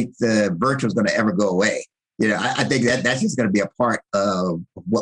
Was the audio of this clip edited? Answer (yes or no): no